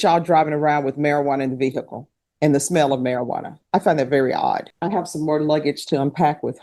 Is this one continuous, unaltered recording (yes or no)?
no